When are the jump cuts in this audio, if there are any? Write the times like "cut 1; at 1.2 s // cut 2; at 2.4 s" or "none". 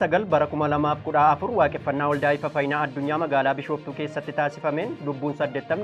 none